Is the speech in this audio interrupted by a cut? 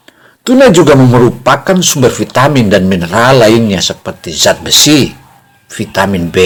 no; 0 cuts

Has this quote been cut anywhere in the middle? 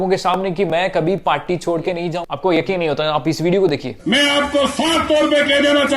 yes; 1 cut; at 2.2 s

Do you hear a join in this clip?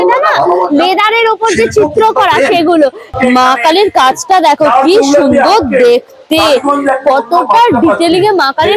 yes; 1 cut; at 3.4 s

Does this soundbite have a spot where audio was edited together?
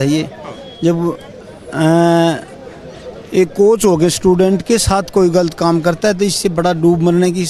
no; 0 cuts

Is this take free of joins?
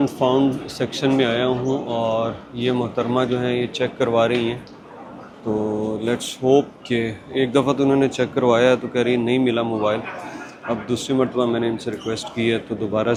yes; 0 cuts

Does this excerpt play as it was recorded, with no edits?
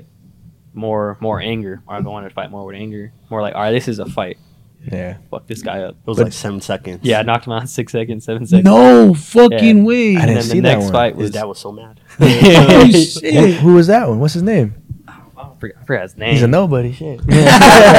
yes; 0 cuts

